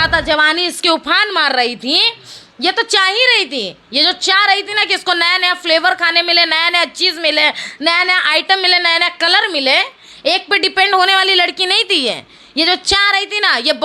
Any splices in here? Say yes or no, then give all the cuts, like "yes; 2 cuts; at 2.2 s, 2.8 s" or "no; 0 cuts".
no; 0 cuts